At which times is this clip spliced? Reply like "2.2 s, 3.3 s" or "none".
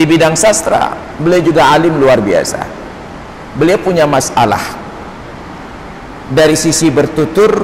none